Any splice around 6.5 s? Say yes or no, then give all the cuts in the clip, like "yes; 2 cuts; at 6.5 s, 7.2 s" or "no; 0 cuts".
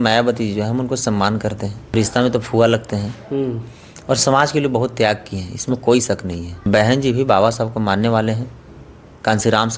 yes; 2 cuts; at 1.9 s, 6.5 s